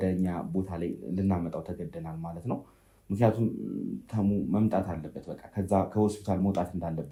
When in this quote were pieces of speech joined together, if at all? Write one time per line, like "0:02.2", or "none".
none